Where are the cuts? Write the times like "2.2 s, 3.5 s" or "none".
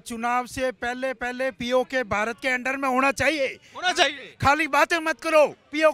none